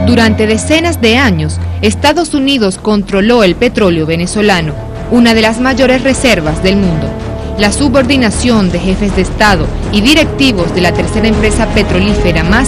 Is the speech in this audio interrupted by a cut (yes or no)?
yes